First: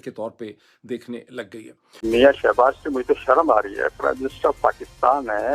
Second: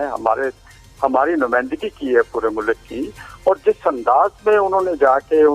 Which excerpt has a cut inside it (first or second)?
first